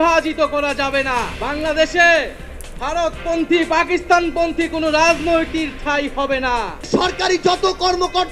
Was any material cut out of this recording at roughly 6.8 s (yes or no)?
yes